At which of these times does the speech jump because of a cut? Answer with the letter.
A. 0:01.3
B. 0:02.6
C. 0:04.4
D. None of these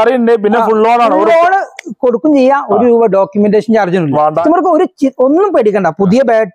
C